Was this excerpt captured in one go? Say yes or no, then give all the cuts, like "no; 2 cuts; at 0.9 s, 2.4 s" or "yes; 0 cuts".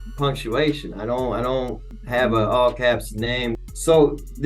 no; 2 cuts; at 1.9 s, 3.6 s